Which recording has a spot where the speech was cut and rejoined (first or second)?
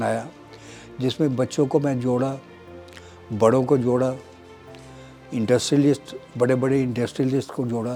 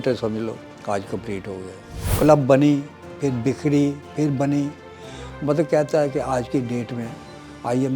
second